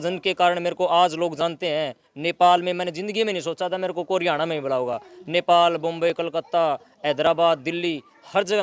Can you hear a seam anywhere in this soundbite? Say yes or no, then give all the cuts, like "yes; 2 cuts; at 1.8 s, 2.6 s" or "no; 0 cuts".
no; 0 cuts